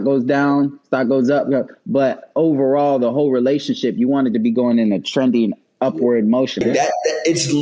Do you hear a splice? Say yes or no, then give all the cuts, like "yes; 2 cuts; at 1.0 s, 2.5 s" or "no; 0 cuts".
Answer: yes; 1 cut; at 6.6 s